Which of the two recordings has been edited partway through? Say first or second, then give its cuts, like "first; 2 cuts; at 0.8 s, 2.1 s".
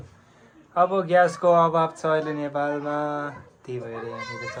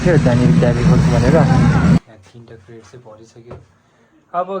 second; 1 cut; at 2.0 s